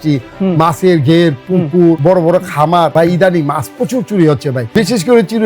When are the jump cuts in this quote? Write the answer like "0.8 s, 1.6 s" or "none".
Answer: 2.0 s, 2.9 s, 4.6 s